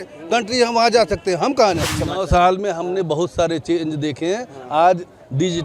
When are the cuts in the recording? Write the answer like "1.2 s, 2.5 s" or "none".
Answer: 1.9 s